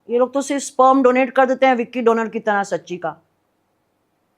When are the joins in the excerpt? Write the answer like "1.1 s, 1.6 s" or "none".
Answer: none